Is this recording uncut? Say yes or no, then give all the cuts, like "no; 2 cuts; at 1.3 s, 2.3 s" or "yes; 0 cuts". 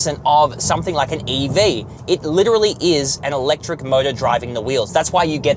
yes; 0 cuts